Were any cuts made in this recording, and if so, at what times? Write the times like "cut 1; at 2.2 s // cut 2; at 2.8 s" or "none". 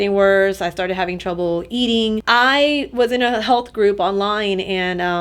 cut 1; at 2.2 s